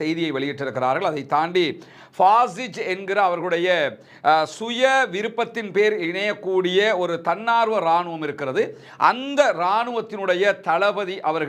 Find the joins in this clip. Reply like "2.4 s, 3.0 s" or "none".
none